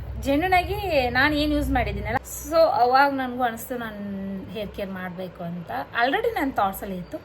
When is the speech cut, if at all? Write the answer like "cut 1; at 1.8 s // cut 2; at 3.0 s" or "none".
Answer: cut 1; at 2.3 s